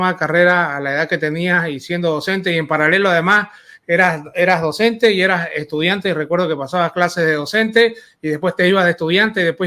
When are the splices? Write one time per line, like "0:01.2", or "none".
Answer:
none